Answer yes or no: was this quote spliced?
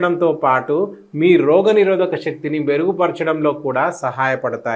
no